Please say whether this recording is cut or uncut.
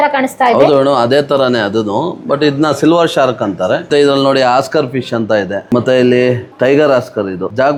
uncut